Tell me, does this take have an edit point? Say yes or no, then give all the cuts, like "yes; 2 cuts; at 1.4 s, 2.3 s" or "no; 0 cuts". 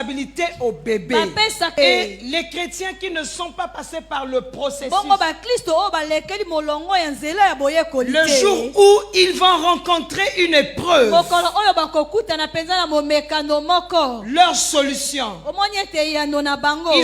yes; 1 cut; at 1.7 s